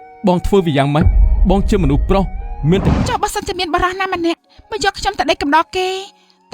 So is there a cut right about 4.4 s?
yes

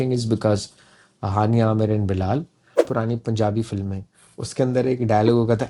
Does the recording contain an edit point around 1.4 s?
no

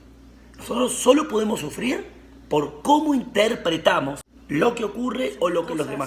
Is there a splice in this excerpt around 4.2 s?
yes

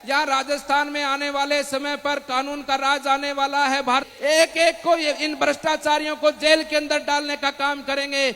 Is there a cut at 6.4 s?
no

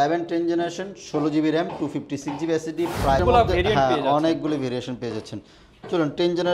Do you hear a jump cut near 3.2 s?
yes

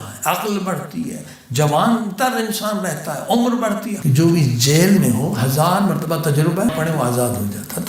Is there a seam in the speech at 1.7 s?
no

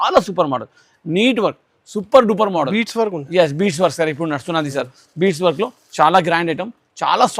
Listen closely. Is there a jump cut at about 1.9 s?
no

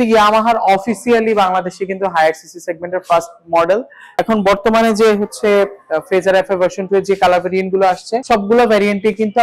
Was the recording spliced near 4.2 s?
yes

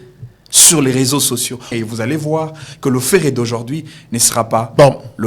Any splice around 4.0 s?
no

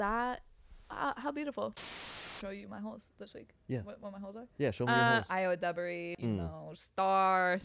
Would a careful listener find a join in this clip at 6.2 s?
yes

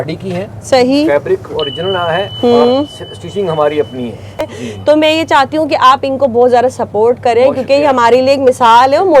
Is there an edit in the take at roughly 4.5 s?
yes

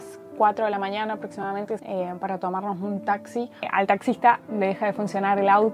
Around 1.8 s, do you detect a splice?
yes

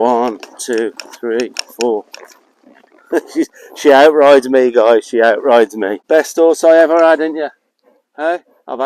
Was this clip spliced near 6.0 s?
yes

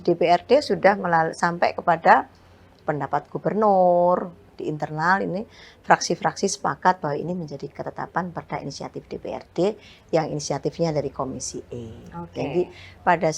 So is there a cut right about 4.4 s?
yes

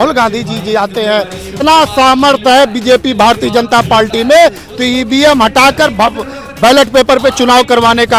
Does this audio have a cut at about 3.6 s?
no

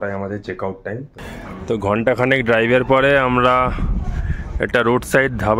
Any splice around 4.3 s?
no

